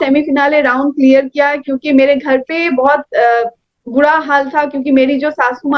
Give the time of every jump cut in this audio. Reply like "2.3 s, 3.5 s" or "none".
none